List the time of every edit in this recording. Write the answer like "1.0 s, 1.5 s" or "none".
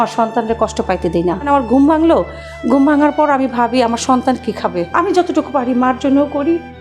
1.5 s, 4.9 s

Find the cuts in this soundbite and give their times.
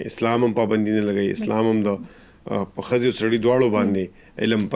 none

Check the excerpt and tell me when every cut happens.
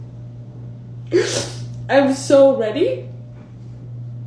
none

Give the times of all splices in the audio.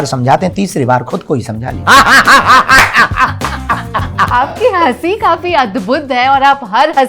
1.8 s, 4.4 s

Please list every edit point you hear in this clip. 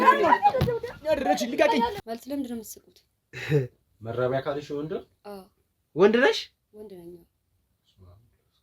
2.1 s

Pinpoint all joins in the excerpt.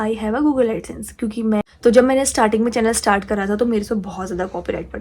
1.6 s

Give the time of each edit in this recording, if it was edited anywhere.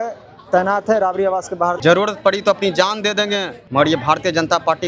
1.8 s, 3.6 s

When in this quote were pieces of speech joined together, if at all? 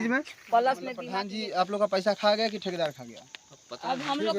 1.2 s

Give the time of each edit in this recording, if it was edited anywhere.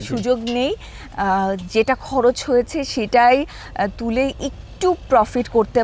none

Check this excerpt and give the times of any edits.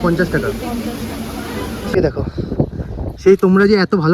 2.0 s

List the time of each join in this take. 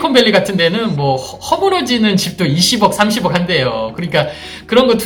none

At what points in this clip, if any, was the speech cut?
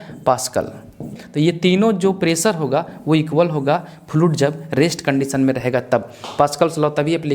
1.2 s

